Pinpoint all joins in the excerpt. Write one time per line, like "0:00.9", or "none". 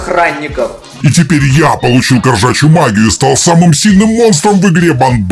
0:00.9